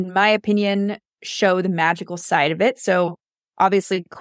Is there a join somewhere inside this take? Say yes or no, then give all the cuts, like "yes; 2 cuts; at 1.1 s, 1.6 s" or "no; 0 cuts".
no; 0 cuts